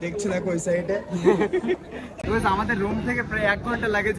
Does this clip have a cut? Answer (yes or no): no